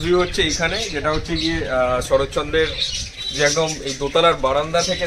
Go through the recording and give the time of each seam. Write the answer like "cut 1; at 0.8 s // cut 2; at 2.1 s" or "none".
none